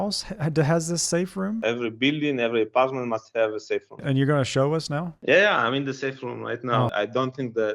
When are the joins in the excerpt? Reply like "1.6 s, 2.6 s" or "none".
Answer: 1.6 s, 4.0 s, 5.1 s, 6.9 s